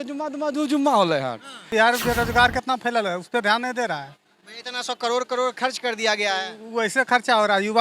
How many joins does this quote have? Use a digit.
1